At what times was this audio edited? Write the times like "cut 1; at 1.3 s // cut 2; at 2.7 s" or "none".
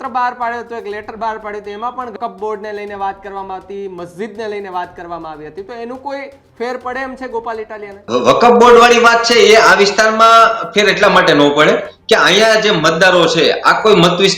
cut 1; at 2.1 s // cut 2; at 8.0 s